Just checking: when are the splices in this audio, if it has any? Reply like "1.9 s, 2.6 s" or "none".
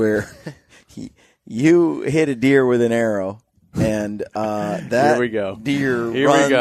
none